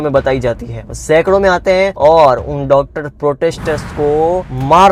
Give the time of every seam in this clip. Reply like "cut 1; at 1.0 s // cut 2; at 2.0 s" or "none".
none